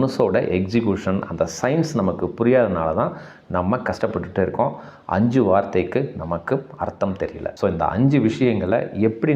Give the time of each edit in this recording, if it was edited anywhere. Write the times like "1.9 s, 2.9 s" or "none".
7.5 s